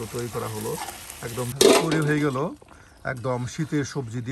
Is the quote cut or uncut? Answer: cut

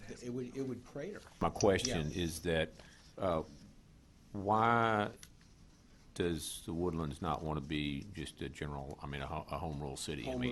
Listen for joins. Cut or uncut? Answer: cut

